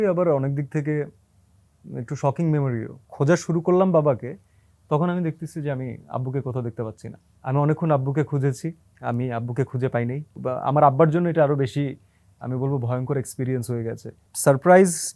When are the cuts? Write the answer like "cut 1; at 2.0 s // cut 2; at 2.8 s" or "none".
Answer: cut 1; at 3.0 s // cut 2; at 7.3 s // cut 3; at 8.9 s // cut 4; at 10.4 s // cut 5; at 14.3 s

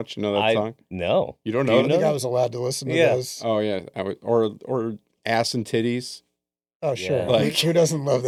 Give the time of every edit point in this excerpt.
none

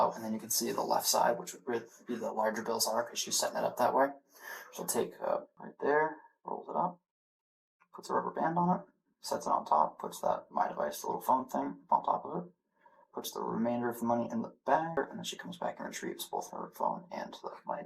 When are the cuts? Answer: cut 1; at 5.6 s // cut 2; at 15.0 s

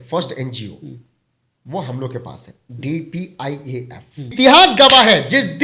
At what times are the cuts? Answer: cut 1; at 4.3 s

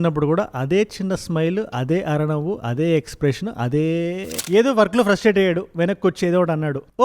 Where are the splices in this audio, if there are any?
cut 1; at 4.3 s

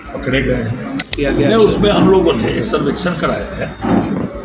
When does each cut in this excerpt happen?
cut 1; at 1.1 s

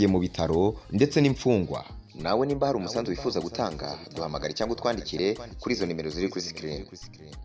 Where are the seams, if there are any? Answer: none

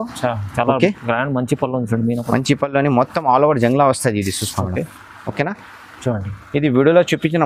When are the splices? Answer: none

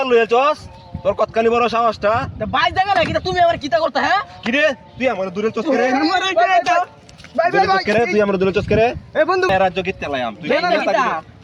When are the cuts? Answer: cut 1; at 9.5 s

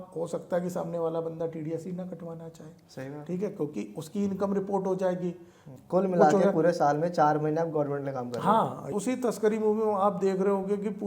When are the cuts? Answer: cut 1; at 5.7 s // cut 2; at 8.9 s

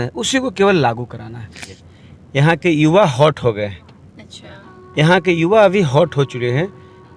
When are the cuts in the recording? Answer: cut 1; at 1.7 s

